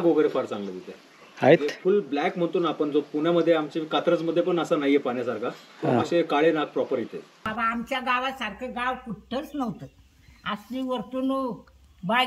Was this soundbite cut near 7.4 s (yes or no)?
yes